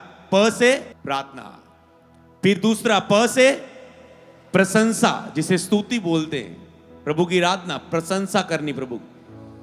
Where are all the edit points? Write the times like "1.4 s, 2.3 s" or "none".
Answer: 0.9 s